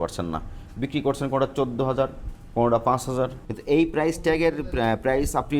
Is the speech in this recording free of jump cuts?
no; 1 cut; at 3.5 s

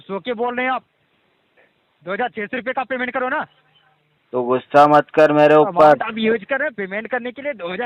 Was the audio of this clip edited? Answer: no; 0 cuts

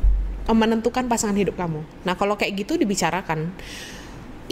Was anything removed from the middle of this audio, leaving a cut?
yes; 1 cut; at 1.9 s

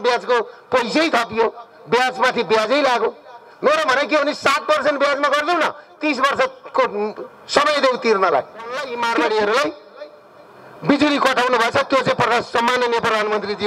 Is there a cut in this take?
yes; 1 cut; at 8.8 s

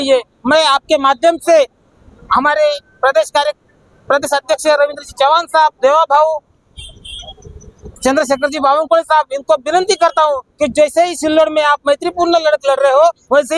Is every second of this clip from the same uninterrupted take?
yes; 0 cuts

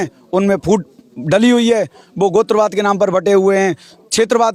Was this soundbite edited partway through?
no; 0 cuts

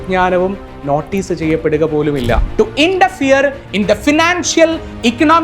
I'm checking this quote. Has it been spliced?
yes; 1 cut; at 2.5 s

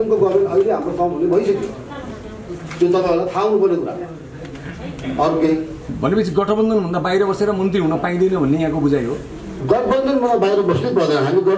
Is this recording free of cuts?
yes; 0 cuts

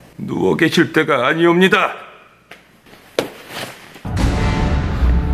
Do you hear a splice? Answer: no; 0 cuts

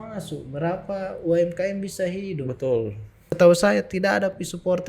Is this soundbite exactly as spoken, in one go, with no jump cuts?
no; 1 cut; at 3.3 s

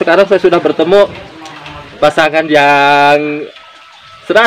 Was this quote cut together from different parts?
no; 0 cuts

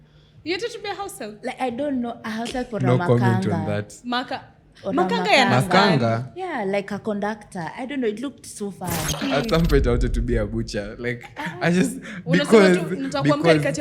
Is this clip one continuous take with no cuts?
no; 1 cut; at 9.2 s

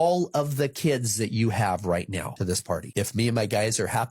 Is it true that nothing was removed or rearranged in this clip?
no; 1 cut; at 2.6 s

